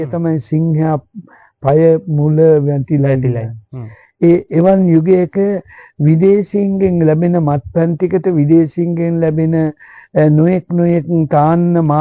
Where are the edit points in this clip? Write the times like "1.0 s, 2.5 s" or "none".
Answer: none